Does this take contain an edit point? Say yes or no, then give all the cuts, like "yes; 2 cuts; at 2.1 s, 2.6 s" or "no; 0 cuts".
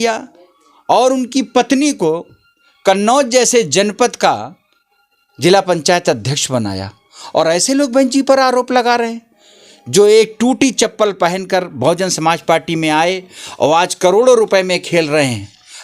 no; 0 cuts